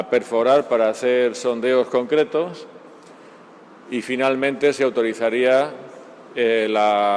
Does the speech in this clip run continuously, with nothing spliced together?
no; 1 cut; at 1.1 s

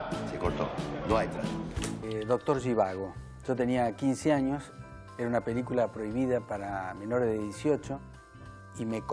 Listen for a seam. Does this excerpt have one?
no; 0 cuts

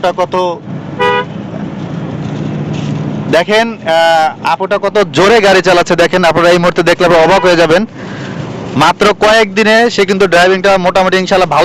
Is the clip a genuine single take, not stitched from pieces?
yes; 0 cuts

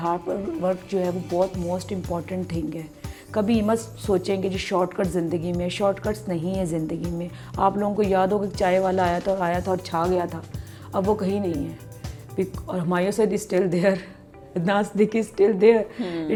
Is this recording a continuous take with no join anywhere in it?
yes; 0 cuts

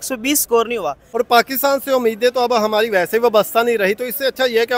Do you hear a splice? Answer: yes; 1 cut; at 1.0 s

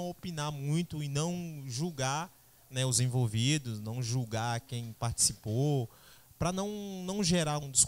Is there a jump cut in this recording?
no; 0 cuts

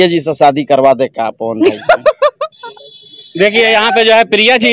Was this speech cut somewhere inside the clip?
no; 0 cuts

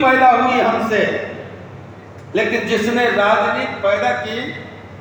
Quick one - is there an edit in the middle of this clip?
no; 0 cuts

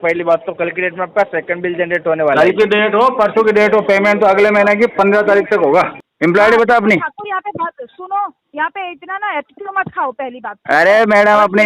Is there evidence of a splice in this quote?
yes; 1 cut; at 6.0 s

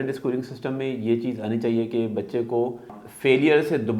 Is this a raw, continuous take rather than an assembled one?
no; 1 cut; at 3.0 s

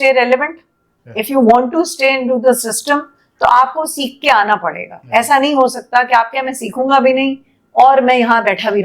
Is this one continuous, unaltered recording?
yes; 0 cuts

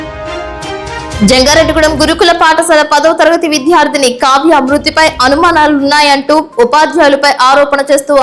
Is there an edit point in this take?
yes; 1 cut; at 0.9 s

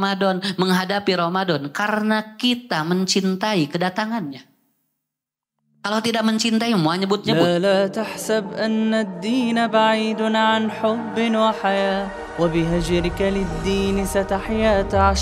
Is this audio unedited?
no; 1 cut; at 7.3 s

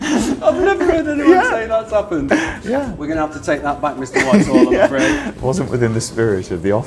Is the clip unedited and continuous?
no; 1 cut; at 5.3 s

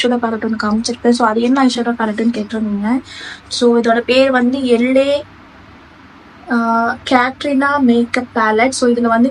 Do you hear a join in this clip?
no; 0 cuts

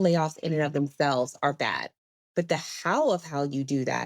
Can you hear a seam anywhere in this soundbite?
yes; 1 cut; at 2.2 s

